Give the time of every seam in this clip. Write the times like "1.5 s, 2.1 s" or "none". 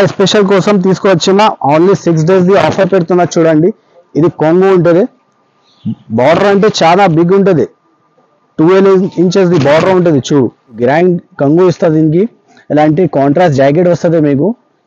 10.8 s